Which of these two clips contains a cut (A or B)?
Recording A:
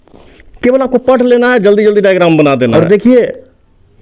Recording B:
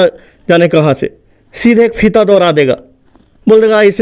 A